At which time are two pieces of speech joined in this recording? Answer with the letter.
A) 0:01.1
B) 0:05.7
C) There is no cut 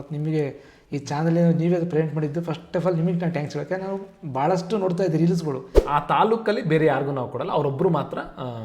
B